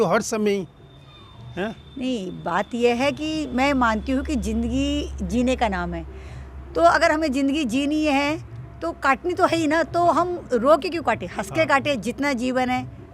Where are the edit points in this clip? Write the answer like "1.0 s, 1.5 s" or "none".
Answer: none